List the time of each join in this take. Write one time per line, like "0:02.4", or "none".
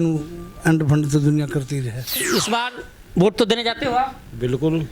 0:02.2